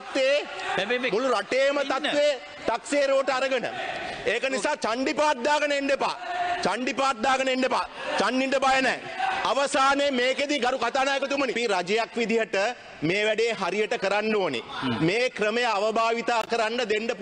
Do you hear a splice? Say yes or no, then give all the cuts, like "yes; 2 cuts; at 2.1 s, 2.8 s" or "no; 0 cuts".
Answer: yes; 1 cut; at 11.6 s